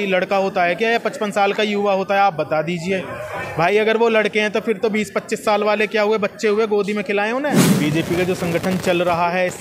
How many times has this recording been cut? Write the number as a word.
one